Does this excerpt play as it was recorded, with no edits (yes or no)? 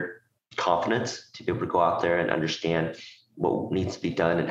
yes